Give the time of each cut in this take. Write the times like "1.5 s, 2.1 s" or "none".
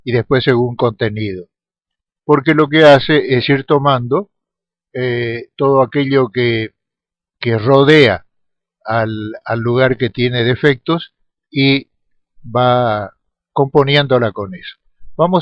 13.2 s